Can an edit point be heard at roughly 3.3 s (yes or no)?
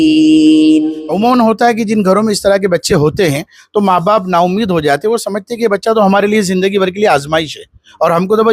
no